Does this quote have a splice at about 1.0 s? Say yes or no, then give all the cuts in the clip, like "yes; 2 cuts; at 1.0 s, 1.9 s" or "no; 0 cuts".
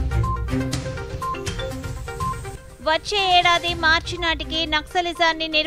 yes; 1 cut; at 1.0 s